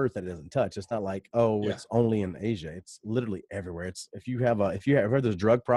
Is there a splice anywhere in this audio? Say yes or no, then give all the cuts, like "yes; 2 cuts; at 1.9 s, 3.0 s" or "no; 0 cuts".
no; 0 cuts